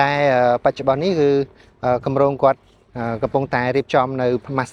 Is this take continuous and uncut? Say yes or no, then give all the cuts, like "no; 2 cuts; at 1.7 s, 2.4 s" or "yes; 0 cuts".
yes; 0 cuts